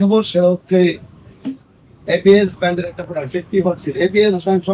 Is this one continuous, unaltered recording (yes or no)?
yes